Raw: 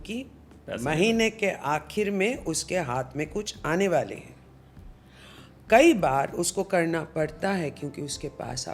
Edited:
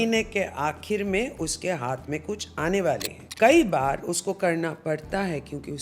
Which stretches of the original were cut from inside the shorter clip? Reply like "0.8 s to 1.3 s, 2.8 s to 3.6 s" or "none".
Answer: 4.2 s to 5.5 s